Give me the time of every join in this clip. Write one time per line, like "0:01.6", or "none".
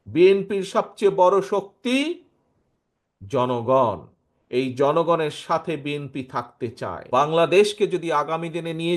0:07.0